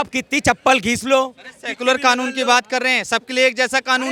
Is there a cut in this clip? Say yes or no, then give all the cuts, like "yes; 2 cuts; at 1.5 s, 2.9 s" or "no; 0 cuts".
no; 0 cuts